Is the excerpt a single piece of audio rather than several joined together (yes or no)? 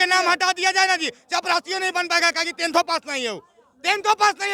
yes